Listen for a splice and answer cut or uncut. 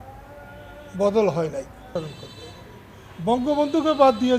cut